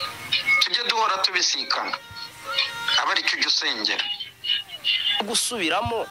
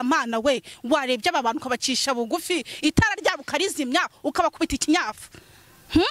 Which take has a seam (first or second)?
first